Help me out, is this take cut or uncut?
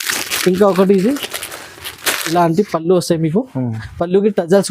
cut